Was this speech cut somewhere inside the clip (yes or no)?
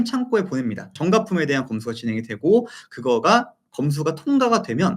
yes